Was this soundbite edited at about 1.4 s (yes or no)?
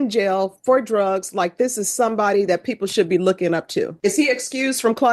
no